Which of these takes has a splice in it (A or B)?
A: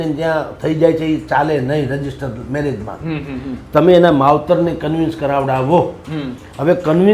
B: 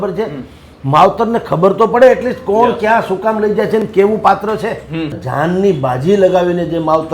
B